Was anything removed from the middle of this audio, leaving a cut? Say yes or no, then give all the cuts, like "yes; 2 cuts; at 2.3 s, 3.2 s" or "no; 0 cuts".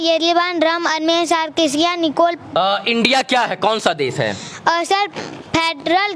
yes; 1 cut; at 2.4 s